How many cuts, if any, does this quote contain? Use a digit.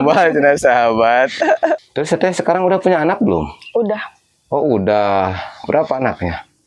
1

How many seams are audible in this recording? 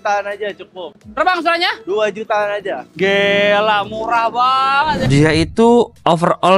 1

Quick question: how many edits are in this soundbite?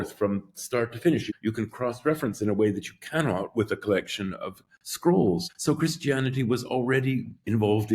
2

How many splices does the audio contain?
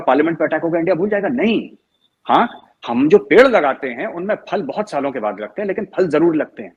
0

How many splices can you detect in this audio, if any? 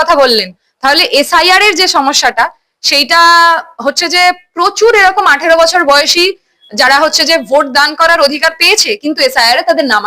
0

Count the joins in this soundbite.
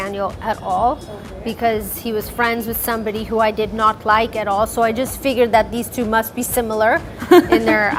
0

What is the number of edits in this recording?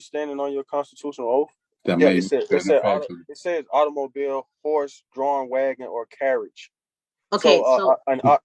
1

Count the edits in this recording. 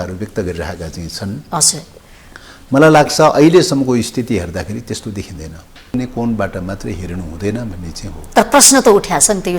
1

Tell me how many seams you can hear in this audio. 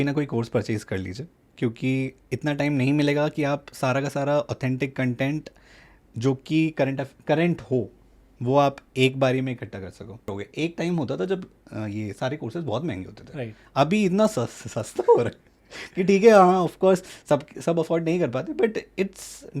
1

